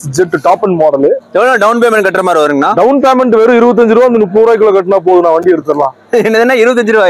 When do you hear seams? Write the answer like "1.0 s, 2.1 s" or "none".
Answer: 1.2 s